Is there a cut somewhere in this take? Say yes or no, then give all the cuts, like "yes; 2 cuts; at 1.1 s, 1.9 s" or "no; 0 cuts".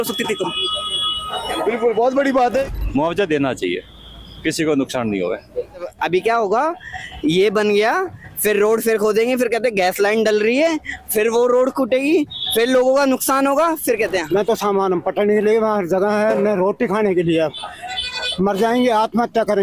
yes; 3 cuts; at 2.7 s, 5.9 s, 14.3 s